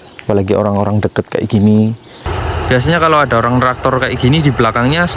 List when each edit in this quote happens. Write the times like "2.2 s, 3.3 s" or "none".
2.3 s